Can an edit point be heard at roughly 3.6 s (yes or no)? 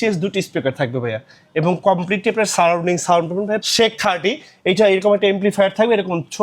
yes